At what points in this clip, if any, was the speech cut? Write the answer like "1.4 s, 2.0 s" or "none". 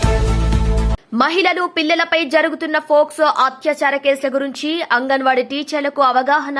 0.9 s